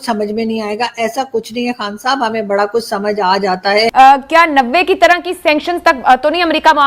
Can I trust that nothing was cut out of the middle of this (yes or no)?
no